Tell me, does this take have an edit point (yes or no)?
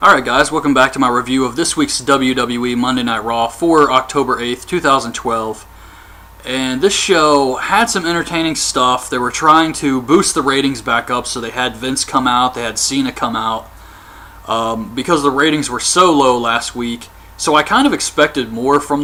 no